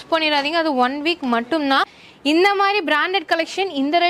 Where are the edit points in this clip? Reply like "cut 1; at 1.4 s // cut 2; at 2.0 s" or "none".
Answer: cut 1; at 2.0 s